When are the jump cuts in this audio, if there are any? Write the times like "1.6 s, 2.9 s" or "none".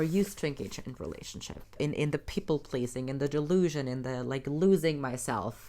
1.8 s